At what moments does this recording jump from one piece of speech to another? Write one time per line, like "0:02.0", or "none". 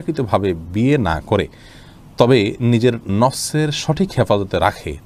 none